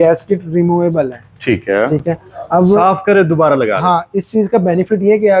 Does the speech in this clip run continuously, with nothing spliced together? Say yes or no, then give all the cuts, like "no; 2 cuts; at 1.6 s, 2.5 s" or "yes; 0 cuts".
yes; 0 cuts